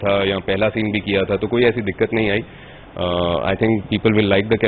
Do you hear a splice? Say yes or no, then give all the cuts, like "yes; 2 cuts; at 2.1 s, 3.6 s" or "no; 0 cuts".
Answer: no; 0 cuts